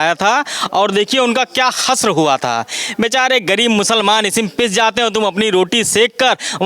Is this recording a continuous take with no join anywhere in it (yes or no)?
yes